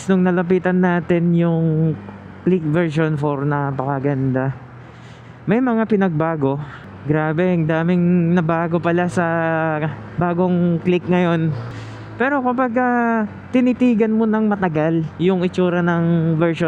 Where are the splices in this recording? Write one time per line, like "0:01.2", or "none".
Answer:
none